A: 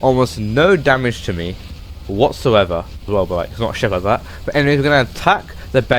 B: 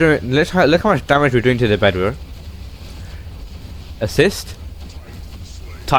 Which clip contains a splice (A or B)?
A